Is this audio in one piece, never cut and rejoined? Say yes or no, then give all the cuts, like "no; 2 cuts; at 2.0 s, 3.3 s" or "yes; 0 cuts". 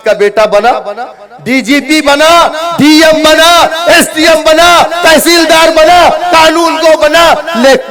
yes; 0 cuts